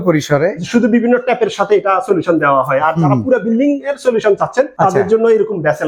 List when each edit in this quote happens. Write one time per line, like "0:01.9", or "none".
0:04.7